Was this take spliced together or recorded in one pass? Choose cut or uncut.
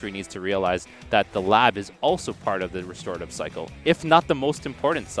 uncut